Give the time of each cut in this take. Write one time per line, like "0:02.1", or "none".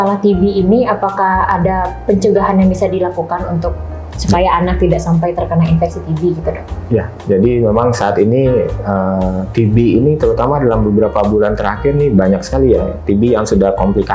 none